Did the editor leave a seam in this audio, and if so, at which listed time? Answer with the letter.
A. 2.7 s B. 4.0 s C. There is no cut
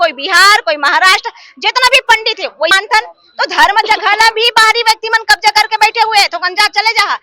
A